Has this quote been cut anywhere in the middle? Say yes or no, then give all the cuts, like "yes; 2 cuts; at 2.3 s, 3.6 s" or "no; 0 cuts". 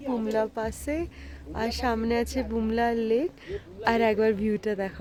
no; 0 cuts